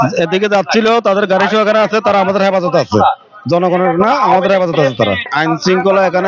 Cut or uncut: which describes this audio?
uncut